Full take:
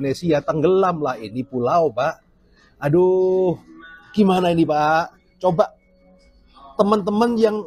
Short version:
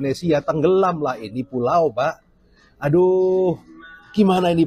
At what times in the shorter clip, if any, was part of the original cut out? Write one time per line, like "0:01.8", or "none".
none